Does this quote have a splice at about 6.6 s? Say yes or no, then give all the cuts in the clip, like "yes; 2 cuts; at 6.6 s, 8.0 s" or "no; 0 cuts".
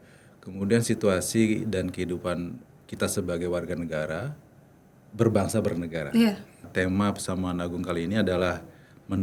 yes; 1 cut; at 6.6 s